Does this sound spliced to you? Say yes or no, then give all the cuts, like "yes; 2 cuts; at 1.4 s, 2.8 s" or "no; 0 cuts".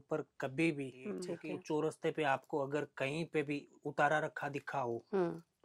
yes; 1 cut; at 1.3 s